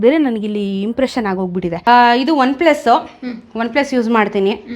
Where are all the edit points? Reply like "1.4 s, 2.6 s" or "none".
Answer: 1.8 s